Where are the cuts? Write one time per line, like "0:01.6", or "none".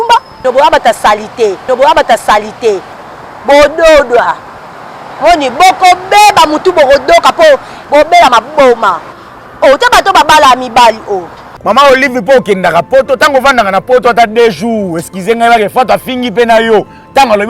0:11.4